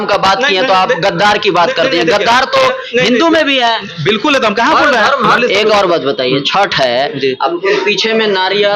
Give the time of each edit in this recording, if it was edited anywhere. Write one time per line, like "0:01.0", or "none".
0:05.3